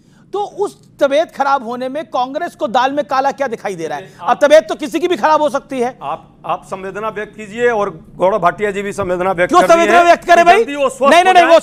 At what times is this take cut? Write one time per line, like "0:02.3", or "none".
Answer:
none